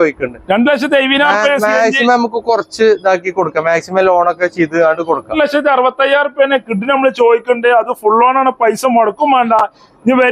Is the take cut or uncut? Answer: cut